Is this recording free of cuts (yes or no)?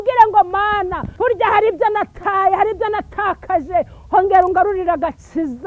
no